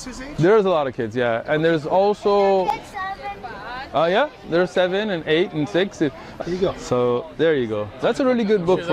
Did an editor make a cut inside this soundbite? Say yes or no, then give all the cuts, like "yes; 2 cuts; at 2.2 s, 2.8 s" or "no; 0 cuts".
yes; 1 cut; at 6.3 s